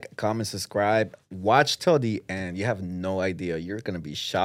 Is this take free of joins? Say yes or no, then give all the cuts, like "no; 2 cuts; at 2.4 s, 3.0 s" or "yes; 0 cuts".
yes; 0 cuts